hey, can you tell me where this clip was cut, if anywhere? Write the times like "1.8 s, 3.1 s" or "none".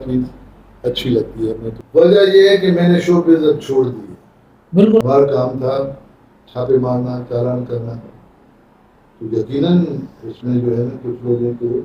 1.7 s, 5.0 s